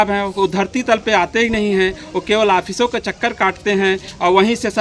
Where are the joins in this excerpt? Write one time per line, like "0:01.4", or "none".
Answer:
none